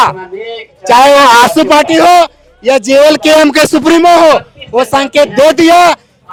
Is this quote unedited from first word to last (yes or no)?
yes